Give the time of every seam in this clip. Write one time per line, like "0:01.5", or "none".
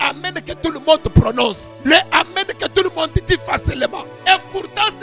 0:01.7
0:04.1